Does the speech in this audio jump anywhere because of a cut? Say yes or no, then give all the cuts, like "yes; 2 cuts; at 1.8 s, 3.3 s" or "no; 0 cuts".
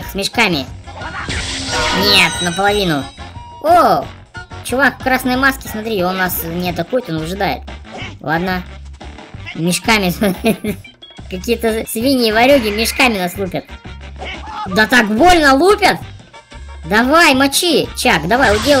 no; 0 cuts